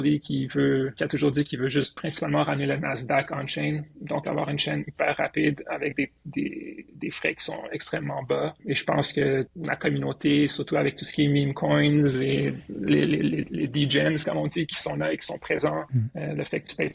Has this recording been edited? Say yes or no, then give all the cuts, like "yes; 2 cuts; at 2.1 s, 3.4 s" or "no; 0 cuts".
yes; 5 cuts; at 1.0 s, 2.0 s, 8.6 s, 9.6 s, 15.9 s